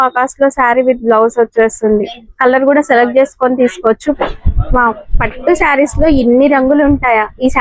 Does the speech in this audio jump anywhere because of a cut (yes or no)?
yes